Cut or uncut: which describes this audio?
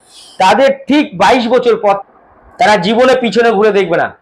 cut